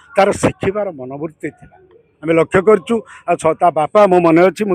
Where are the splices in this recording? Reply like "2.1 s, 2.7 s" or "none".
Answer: none